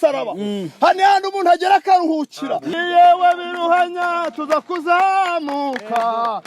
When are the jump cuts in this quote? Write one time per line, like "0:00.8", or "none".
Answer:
0:02.7